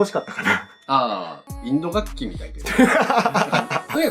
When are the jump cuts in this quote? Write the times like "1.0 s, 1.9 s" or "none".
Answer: 1.4 s